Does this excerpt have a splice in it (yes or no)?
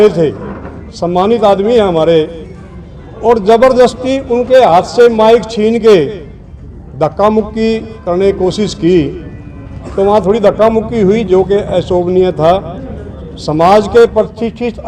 no